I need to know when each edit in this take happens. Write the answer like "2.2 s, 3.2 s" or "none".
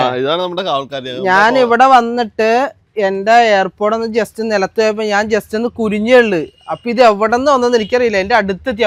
none